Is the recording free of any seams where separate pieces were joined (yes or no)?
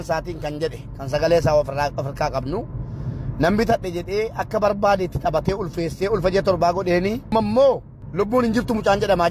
no